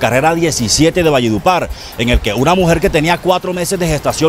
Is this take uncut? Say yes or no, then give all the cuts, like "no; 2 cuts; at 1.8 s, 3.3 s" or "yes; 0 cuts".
yes; 0 cuts